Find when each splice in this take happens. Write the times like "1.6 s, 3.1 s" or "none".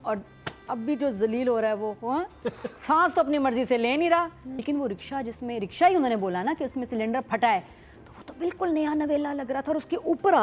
4.5 s